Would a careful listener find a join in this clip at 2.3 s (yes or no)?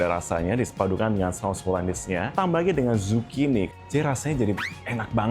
yes